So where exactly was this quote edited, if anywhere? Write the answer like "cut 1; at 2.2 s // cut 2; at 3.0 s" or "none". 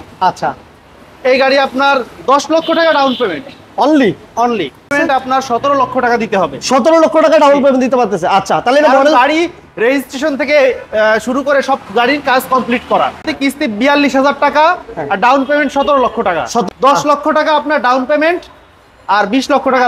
cut 1; at 4.9 s // cut 2; at 13.3 s // cut 3; at 16.7 s